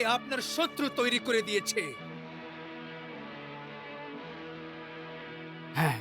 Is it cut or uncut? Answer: uncut